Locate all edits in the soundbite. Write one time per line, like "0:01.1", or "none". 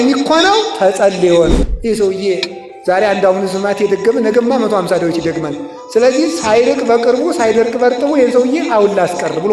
0:01.6